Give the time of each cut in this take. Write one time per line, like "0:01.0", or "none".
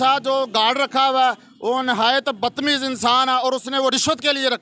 none